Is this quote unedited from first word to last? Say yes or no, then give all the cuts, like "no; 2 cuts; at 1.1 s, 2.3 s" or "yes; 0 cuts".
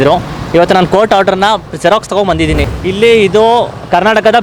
no; 1 cut; at 2.6 s